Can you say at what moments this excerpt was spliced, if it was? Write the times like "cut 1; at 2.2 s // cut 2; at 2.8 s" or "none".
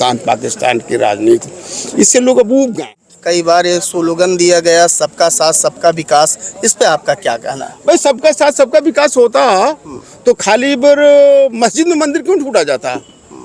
cut 1; at 3.1 s